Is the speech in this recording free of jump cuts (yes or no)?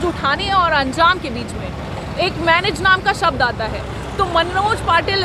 yes